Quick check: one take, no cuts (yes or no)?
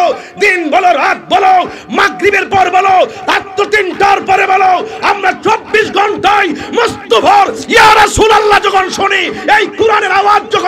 yes